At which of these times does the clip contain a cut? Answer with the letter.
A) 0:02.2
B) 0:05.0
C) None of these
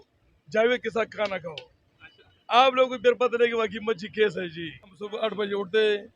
B